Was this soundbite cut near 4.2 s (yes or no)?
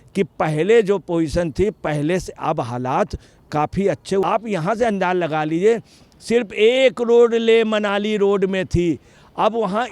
yes